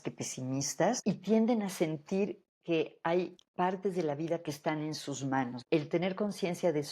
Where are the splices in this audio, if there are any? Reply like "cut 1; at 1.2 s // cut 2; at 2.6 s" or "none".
cut 1; at 1.0 s // cut 2; at 2.5 s // cut 3; at 3.4 s // cut 4; at 5.6 s